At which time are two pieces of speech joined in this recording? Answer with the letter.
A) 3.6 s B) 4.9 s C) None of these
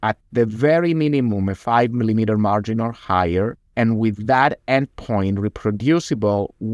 A